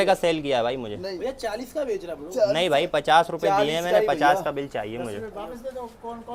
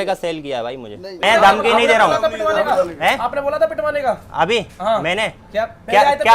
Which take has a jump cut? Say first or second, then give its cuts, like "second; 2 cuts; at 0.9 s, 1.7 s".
second; 1 cut; at 1.2 s